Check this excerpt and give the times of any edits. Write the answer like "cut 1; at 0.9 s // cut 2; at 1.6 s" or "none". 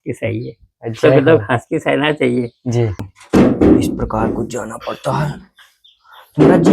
cut 1; at 3.0 s